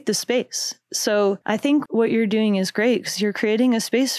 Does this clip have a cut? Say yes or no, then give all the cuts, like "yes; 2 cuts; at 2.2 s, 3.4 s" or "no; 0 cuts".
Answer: no; 0 cuts